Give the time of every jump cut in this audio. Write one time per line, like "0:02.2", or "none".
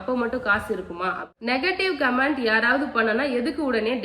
0:01.3